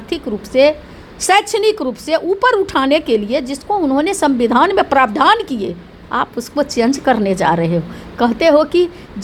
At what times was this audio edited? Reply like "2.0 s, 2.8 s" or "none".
none